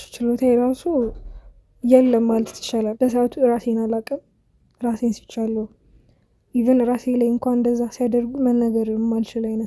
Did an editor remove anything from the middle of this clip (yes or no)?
yes